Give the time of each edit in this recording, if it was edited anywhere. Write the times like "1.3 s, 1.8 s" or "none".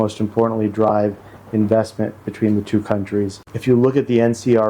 3.4 s